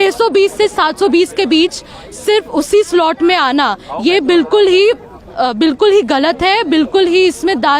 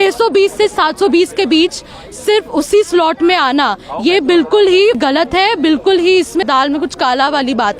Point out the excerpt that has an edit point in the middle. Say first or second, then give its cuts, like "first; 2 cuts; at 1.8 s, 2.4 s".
second; 2 cuts; at 5.0 s, 6.4 s